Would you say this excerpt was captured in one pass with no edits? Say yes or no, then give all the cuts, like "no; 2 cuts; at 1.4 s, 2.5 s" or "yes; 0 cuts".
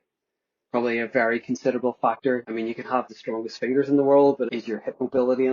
no; 2 cuts; at 2.5 s, 4.5 s